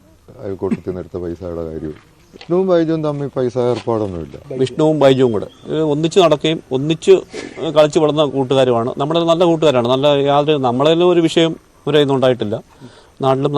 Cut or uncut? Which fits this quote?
cut